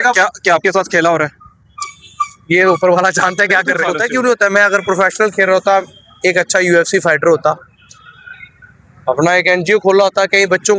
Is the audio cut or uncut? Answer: cut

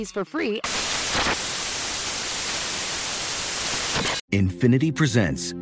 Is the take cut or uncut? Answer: cut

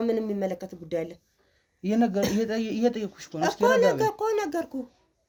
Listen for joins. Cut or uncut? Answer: uncut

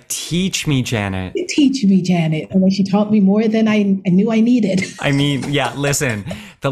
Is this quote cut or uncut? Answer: cut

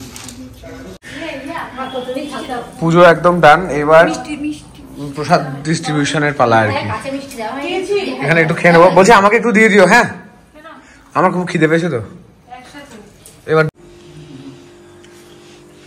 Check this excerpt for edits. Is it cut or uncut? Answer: cut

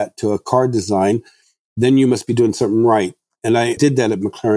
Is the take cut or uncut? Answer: cut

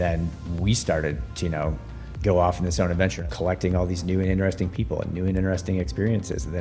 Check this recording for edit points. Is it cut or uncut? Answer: cut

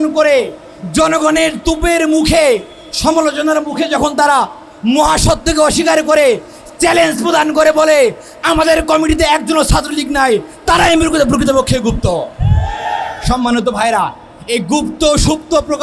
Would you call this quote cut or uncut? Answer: uncut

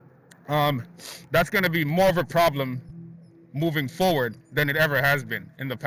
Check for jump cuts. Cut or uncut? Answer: uncut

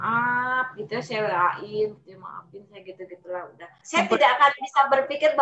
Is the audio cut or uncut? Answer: cut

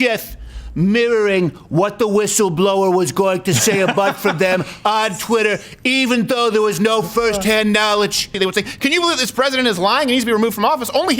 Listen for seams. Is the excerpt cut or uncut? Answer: cut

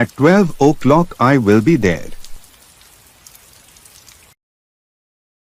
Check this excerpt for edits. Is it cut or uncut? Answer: uncut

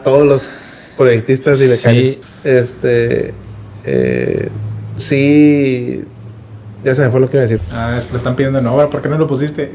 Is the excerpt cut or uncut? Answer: cut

